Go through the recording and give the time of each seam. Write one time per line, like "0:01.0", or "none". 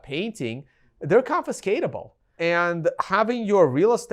0:02.3